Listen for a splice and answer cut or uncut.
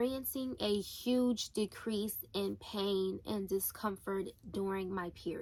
uncut